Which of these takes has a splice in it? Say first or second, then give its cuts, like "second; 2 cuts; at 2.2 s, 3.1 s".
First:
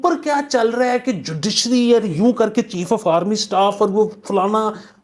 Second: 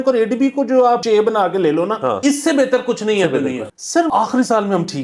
second; 3 cuts; at 1.0 s, 2.2 s, 3.8 s